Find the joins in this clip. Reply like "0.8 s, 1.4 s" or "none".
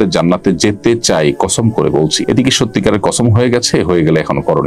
2.2 s